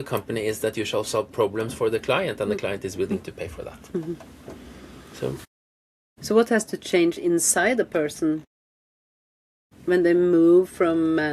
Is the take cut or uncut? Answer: uncut